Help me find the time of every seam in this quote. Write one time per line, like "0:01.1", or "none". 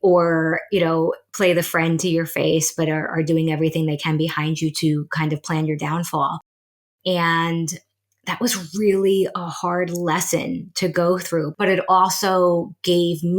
0:01.3
0:11.5